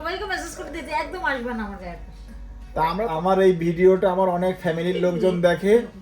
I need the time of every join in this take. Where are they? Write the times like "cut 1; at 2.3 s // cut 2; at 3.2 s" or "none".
cut 1; at 3.0 s